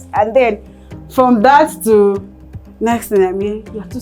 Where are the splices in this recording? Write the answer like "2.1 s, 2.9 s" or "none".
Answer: none